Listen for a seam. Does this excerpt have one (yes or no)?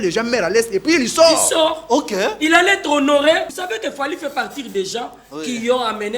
yes